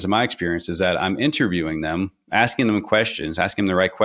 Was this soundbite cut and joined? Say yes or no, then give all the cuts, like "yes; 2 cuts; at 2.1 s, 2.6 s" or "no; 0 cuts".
no; 0 cuts